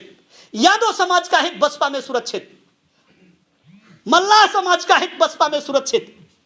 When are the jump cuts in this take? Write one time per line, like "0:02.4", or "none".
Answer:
none